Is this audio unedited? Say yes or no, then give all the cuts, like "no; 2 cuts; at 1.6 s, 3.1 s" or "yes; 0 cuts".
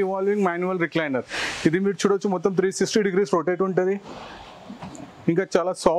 yes; 0 cuts